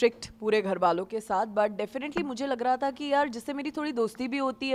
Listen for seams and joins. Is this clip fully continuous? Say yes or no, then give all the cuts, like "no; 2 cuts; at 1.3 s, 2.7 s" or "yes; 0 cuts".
yes; 0 cuts